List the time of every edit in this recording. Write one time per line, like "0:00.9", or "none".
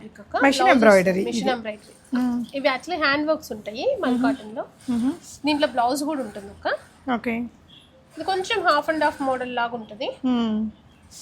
none